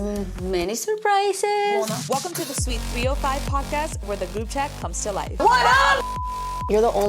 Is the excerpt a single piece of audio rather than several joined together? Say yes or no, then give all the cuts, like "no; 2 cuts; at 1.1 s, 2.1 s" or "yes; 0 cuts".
no; 1 cut; at 1.8 s